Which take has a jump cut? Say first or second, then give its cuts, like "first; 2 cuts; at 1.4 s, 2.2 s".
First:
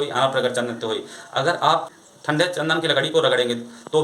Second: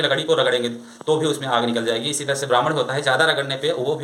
first; 1 cut; at 1.9 s